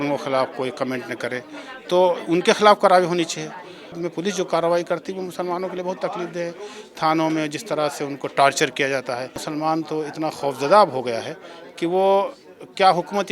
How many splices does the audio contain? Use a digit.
2